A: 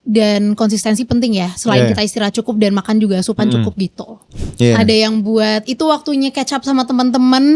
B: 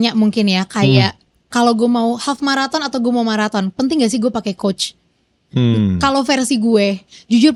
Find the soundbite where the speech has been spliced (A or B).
A